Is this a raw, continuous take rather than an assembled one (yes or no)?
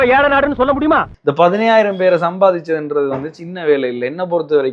no